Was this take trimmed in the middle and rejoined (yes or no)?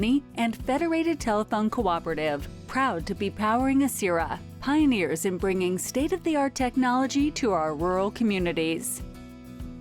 yes